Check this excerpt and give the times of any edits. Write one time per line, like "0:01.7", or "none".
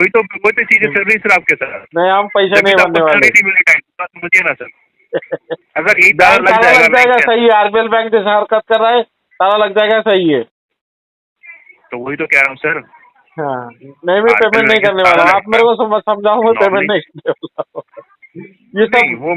none

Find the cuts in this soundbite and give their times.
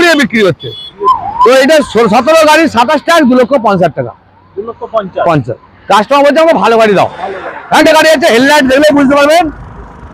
0:01.0
0:07.8

